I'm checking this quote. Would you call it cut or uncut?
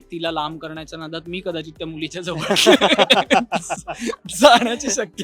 uncut